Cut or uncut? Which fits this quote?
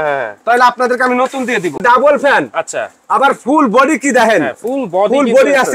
cut